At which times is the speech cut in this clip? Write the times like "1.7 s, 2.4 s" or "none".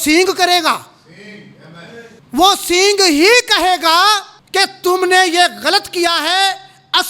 2.2 s, 4.3 s